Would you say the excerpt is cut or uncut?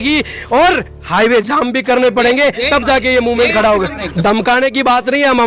cut